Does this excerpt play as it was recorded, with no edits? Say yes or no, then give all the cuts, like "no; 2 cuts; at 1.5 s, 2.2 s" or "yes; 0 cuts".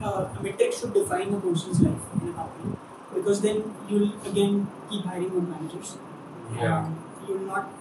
yes; 0 cuts